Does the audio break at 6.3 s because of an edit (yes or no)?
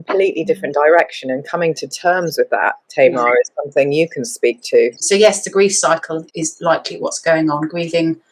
yes